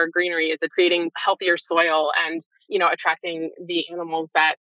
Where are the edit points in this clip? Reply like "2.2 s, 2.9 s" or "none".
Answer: none

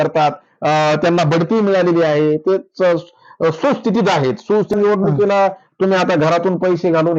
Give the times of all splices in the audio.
4.8 s

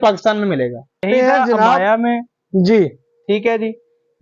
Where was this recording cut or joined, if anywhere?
1.0 s

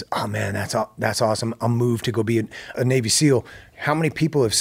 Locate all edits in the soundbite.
2.7 s

